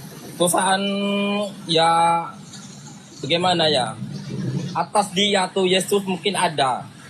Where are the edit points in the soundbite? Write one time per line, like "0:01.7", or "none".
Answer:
none